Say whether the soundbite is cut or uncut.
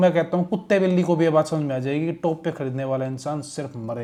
uncut